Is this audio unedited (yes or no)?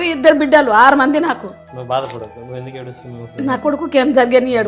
yes